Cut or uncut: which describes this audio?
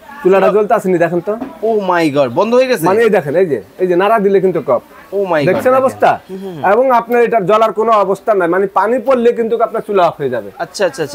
uncut